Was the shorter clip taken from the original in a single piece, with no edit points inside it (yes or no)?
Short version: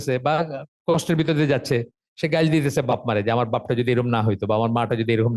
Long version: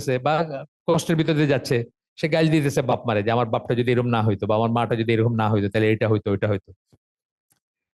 yes